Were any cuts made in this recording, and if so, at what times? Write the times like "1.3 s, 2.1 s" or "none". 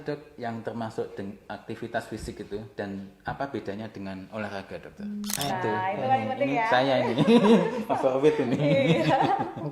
5.3 s